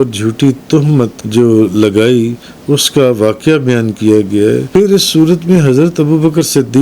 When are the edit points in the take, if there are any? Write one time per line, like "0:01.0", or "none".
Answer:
0:01.2
0:04.6